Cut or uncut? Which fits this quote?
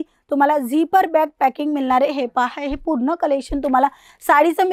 uncut